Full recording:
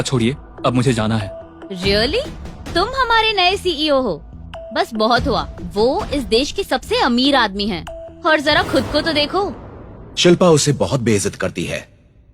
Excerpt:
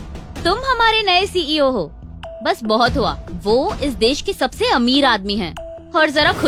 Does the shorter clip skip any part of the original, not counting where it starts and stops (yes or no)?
no